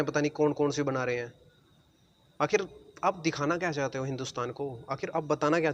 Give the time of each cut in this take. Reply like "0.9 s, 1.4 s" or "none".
none